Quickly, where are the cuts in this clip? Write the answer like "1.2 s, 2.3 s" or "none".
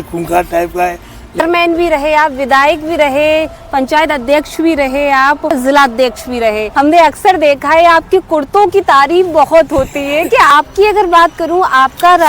1.4 s, 5.6 s, 6.6 s, 10.5 s